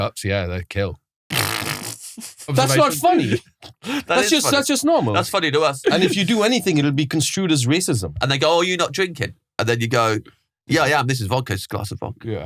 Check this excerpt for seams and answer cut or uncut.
cut